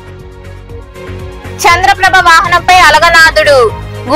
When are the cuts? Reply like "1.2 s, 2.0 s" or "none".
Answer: none